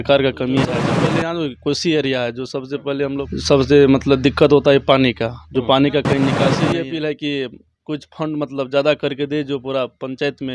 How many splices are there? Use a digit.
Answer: 3